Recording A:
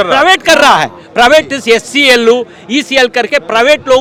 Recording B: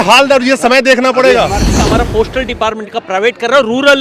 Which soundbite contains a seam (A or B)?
B